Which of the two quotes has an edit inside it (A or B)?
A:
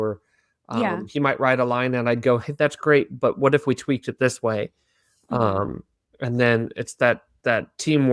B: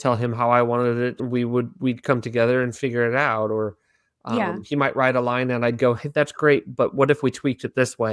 B